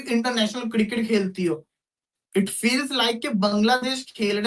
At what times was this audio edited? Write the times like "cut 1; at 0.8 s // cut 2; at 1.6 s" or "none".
none